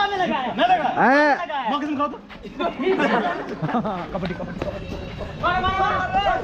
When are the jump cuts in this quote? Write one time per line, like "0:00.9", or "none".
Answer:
0:04.0